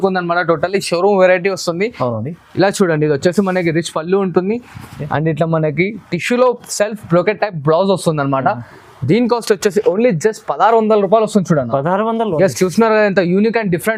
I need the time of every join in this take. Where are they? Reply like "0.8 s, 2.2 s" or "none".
none